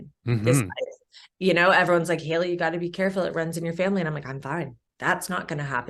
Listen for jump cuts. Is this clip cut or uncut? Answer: cut